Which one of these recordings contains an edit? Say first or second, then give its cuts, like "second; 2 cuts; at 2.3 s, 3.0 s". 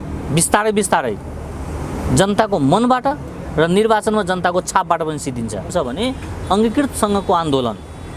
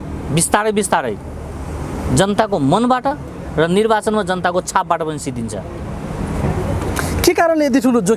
first; 1 cut; at 5.7 s